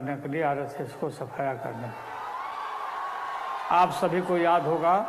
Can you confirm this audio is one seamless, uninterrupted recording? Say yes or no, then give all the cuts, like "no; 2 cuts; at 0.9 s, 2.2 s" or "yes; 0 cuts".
yes; 0 cuts